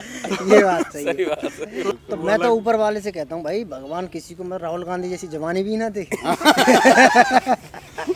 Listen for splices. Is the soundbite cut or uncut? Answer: uncut